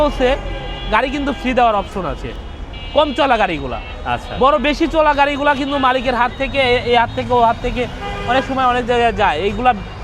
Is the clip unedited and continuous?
yes; 0 cuts

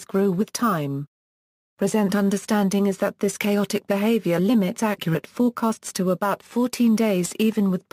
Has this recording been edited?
yes; 1 cut; at 2.6 s

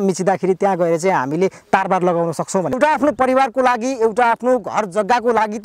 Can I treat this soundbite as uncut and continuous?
no; 1 cut; at 2.7 s

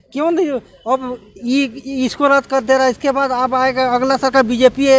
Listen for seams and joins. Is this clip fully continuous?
yes; 0 cuts

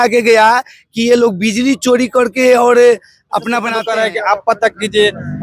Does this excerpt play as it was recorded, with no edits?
no; 1 cut; at 3.7 s

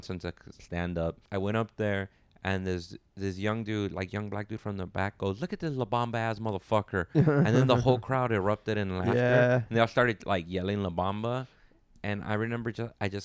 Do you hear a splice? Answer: yes; 1 cut; at 1.2 s

